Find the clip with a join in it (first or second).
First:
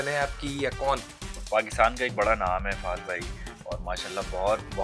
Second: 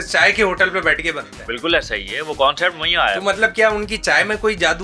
first